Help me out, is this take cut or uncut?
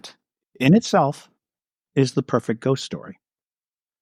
uncut